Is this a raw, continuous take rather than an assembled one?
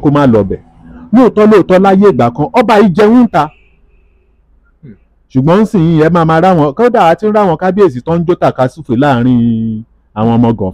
yes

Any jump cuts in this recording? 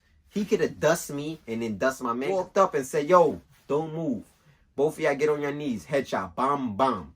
yes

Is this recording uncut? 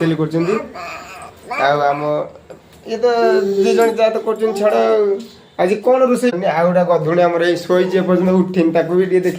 no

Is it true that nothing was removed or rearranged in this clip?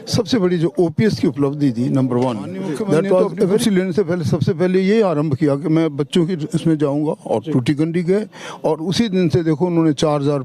no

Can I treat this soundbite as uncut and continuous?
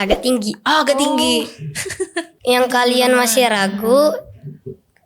no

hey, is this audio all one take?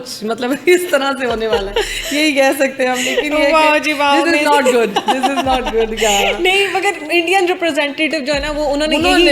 yes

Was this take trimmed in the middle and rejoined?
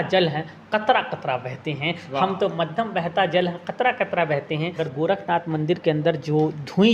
yes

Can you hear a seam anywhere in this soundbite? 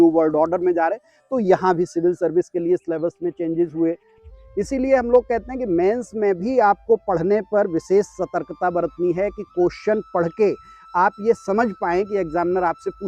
yes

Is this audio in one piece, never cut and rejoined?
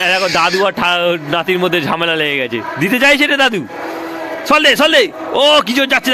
yes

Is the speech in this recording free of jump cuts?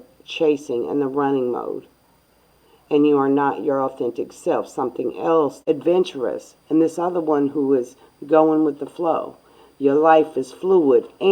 no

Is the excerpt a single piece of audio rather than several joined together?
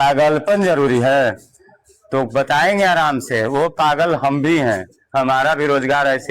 yes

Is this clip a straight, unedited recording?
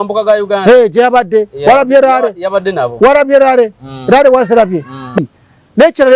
no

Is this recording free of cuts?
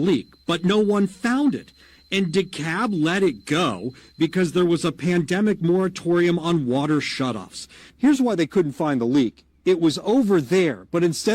no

